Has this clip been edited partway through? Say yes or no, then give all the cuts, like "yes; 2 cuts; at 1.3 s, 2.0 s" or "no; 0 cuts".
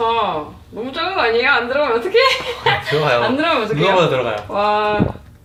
no; 0 cuts